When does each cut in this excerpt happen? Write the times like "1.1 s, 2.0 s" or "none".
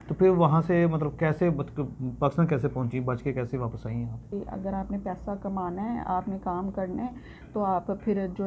4.3 s